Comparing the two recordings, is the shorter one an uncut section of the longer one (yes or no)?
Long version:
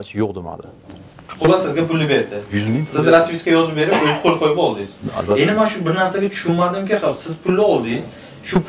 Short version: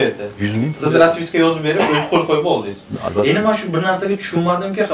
yes